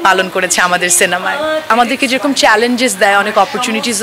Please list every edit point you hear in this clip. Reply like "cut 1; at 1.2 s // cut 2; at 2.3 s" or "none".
cut 1; at 1.7 s